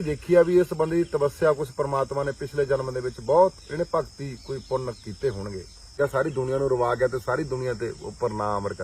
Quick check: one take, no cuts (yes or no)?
no